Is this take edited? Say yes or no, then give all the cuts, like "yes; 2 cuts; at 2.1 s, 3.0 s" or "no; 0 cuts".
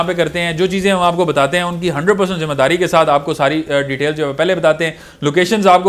no; 0 cuts